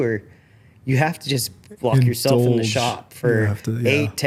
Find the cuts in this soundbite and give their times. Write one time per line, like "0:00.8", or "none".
none